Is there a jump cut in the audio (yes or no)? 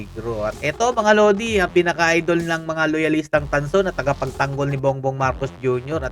no